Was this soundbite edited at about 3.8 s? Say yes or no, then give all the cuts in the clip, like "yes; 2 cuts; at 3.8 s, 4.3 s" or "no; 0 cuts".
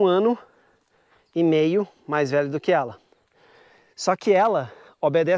no; 0 cuts